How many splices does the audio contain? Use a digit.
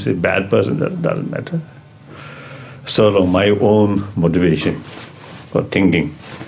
0